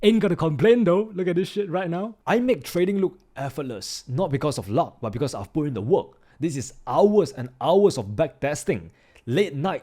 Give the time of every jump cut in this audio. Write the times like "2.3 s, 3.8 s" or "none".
2.1 s